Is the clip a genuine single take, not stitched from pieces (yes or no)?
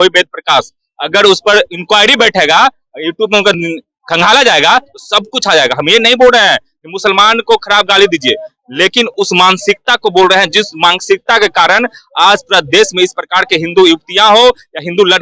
yes